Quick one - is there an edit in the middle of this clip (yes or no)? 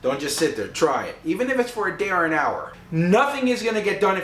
yes